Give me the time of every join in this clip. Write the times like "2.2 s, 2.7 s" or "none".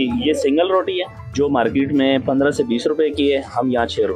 1.2 s